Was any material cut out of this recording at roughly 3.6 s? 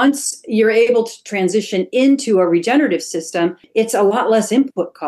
yes; 1 cut; at 3.6 s

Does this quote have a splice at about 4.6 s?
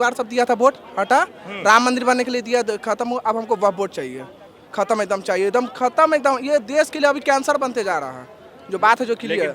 no; 0 cuts

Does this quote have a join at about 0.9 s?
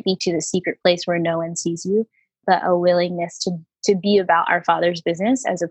no; 0 cuts

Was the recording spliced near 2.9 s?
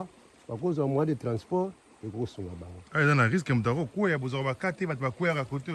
no; 0 cuts

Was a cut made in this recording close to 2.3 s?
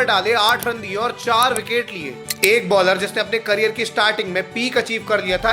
yes; 1 cut; at 2.3 s

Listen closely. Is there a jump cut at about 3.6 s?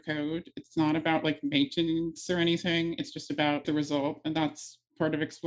yes; 1 cut; at 3.6 s

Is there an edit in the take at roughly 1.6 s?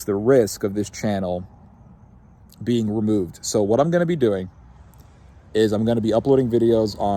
no; 0 cuts

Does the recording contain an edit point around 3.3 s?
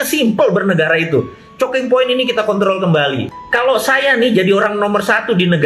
yes; 1 cut; at 3.3 s

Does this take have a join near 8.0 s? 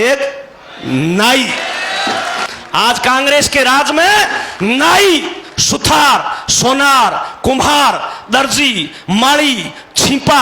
no; 1 cut; at 2.5 s

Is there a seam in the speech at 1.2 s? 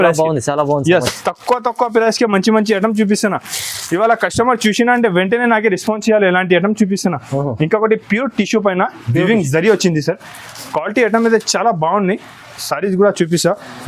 no; 0 cuts

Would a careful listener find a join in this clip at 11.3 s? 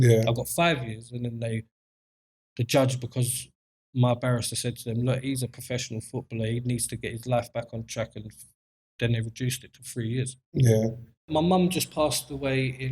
yes; 1 cut; at 11.3 s

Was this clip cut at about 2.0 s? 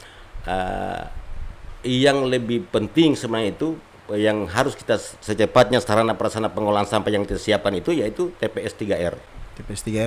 no; 0 cuts

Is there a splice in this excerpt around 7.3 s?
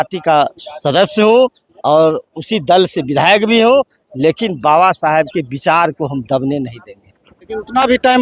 yes; 1 cut; at 7.3 s

